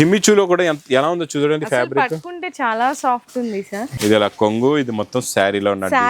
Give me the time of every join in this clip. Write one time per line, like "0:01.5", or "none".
0:03.9